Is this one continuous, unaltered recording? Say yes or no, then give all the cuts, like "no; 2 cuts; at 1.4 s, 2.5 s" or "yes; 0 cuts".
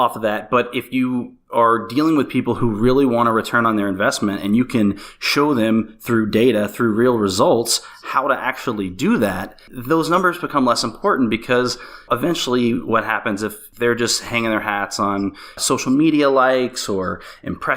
no; 4 cuts; at 9.7 s, 12.0 s, 13.6 s, 15.6 s